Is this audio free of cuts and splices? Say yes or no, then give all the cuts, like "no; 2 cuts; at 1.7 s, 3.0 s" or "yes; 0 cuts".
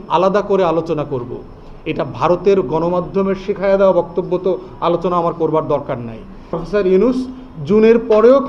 no; 1 cut; at 6.6 s